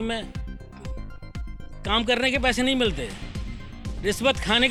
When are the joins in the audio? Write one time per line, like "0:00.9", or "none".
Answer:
none

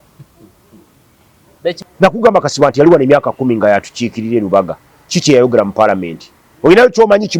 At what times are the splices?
0:01.8

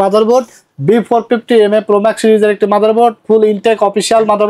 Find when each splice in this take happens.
none

